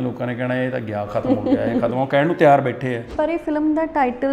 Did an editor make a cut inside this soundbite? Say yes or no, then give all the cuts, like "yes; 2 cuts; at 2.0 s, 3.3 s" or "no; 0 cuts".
yes; 1 cut; at 3.1 s